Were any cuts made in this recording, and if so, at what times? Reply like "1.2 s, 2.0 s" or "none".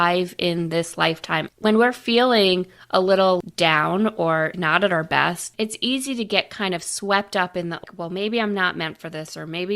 1.5 s, 3.4 s, 4.5 s, 5.5 s, 7.8 s